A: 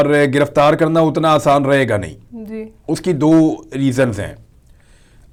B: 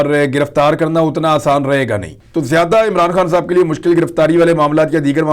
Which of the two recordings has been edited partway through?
B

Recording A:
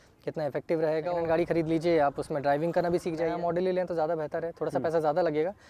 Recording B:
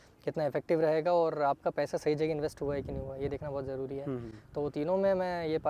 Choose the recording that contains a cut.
A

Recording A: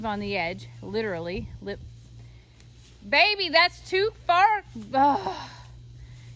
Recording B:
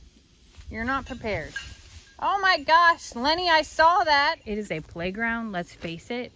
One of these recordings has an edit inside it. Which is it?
B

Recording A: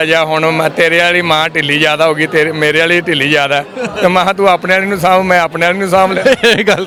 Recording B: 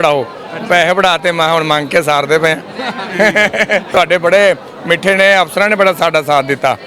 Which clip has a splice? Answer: B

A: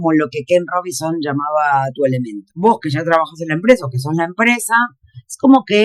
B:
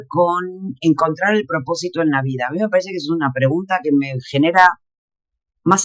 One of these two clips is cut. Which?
A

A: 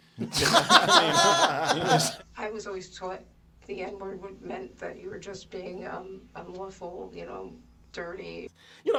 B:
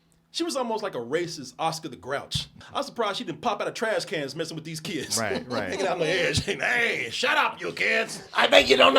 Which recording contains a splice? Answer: B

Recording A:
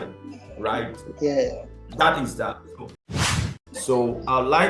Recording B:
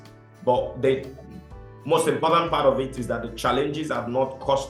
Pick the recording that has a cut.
A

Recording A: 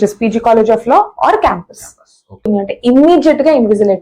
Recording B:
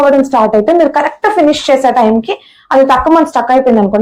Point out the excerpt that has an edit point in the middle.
A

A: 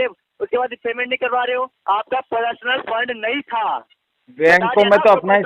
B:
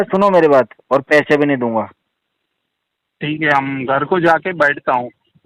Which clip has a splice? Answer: A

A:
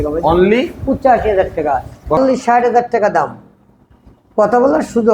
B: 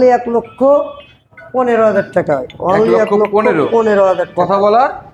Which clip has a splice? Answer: A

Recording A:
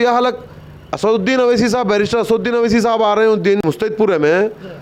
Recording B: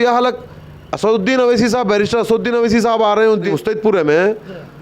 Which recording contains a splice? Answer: B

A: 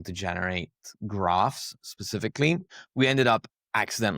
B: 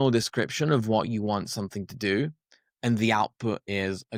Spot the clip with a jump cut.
A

